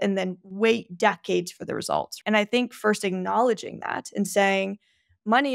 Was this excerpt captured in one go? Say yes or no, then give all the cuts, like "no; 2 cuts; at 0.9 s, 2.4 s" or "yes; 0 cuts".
no; 1 cut; at 2.1 s